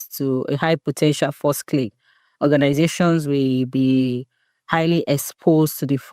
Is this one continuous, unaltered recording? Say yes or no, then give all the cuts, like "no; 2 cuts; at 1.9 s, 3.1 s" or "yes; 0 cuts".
yes; 0 cuts